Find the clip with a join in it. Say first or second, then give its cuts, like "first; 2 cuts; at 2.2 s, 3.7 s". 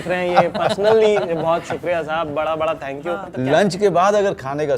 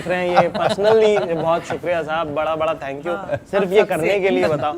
first; 1 cut; at 3.2 s